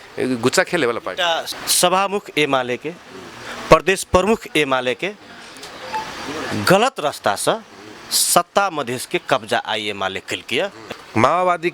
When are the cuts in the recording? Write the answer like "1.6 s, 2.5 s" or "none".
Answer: 1.5 s, 10.8 s